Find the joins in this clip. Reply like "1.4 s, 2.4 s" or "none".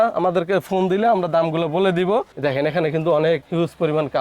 2.3 s